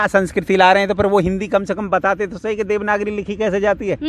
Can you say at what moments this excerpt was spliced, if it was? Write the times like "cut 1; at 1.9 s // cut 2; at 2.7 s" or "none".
none